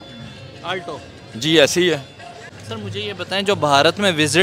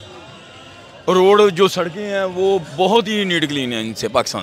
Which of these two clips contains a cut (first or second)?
first